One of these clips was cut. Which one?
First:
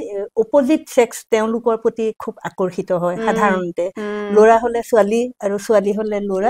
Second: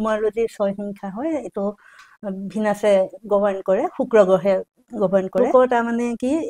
second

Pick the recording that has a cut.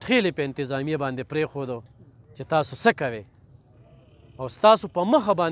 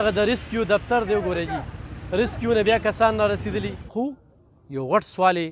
second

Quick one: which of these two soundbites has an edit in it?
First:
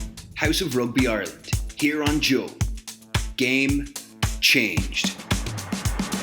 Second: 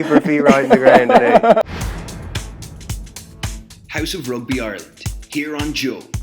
second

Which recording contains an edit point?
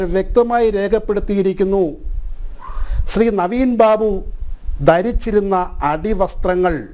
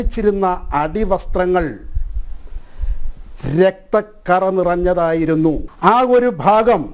second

